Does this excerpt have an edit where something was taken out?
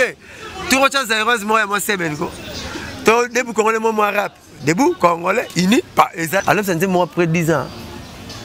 yes; 1 cut; at 6.4 s

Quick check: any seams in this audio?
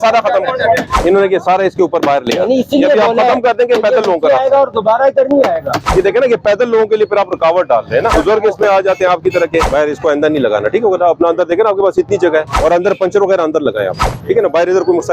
yes; 5 cuts; at 0.9 s, 5.8 s, 8.1 s, 9.7 s, 12.5 s

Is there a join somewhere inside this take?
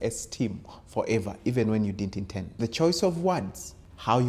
yes; 1 cut; at 2.4 s

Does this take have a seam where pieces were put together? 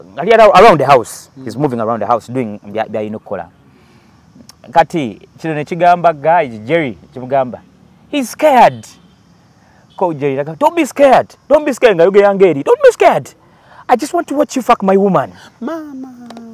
no; 0 cuts

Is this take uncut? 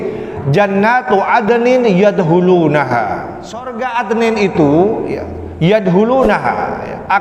no; 1 cut; at 3.8 s

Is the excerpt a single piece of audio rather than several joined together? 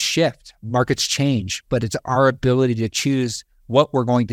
yes; 0 cuts

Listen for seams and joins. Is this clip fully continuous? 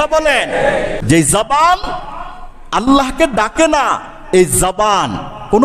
no; 1 cut; at 1.0 s

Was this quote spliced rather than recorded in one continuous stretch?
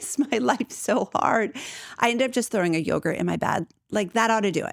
no; 0 cuts

